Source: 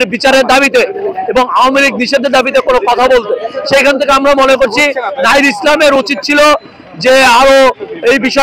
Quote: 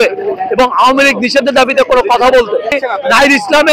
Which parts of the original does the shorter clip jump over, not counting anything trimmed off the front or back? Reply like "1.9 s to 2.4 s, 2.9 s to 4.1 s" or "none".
3.5 s to 4.9 s